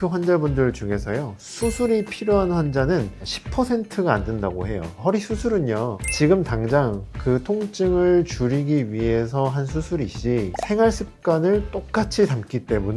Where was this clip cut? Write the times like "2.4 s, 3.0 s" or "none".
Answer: 5.0 s, 10.5 s